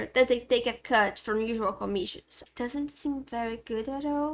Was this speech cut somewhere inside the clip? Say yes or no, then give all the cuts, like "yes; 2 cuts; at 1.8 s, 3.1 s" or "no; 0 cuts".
yes; 1 cut; at 2.4 s